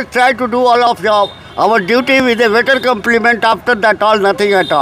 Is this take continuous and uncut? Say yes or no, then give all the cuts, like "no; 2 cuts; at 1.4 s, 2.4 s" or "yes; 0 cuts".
yes; 0 cuts